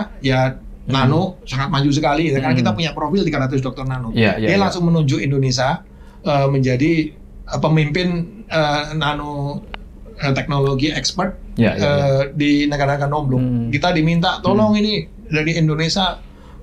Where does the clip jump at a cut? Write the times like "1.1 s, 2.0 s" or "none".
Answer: none